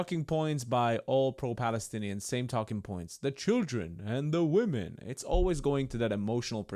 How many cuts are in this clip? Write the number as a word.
zero